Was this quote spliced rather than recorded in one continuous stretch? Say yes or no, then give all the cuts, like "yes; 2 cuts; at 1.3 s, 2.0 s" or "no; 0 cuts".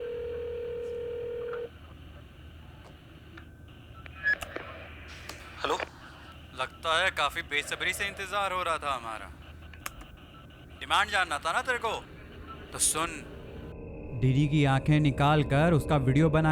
yes; 1 cut; at 13.4 s